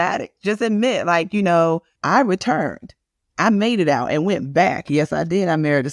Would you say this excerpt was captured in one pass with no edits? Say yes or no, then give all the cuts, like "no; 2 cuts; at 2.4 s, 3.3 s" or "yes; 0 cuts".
no; 1 cut; at 1.9 s